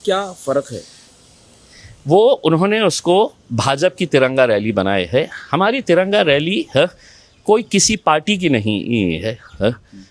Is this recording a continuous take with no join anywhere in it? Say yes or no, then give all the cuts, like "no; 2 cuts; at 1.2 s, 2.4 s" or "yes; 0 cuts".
yes; 0 cuts